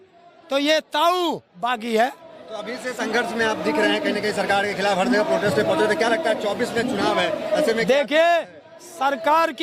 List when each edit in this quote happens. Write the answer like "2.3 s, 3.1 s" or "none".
none